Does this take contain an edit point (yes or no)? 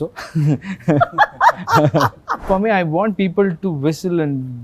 yes